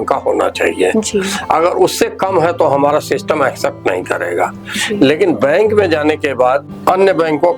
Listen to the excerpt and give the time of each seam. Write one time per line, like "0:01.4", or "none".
none